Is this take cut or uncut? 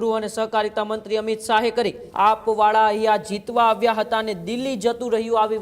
cut